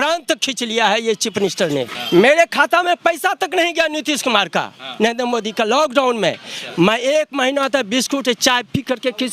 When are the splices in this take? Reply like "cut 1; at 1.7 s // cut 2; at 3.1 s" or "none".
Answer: cut 1; at 1.9 s